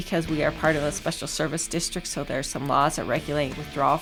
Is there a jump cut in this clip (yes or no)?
no